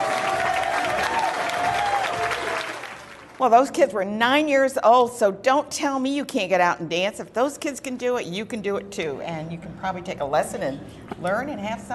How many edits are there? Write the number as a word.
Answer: one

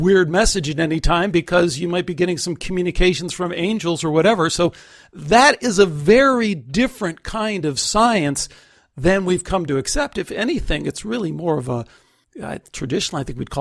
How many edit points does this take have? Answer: zero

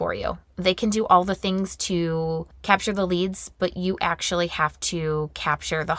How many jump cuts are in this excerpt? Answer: one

